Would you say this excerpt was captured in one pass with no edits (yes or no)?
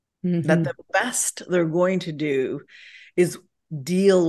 yes